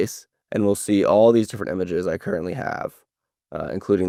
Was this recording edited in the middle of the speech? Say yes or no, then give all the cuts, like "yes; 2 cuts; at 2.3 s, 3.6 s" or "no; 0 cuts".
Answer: no; 0 cuts